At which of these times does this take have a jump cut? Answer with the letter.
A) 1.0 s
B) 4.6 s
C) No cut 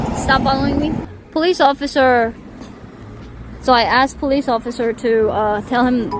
A